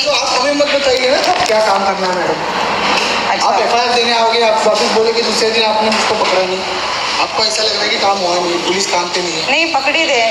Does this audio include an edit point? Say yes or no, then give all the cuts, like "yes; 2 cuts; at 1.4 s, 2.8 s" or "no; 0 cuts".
no; 0 cuts